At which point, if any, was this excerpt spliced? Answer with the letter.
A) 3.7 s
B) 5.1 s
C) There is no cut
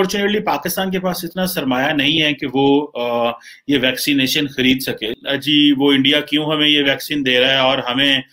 B